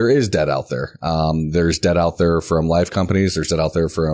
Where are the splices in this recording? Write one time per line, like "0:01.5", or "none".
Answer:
none